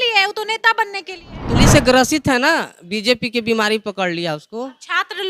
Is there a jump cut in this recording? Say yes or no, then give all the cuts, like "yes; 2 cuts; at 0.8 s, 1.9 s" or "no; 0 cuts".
yes; 1 cut; at 1.6 s